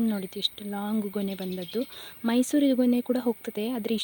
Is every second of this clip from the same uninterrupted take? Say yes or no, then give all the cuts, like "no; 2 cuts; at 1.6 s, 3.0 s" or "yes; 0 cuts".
yes; 0 cuts